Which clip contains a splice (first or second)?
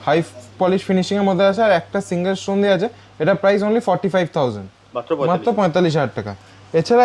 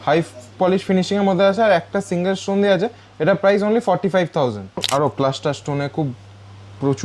second